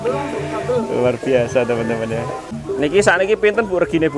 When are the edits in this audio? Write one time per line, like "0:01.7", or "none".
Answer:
0:02.5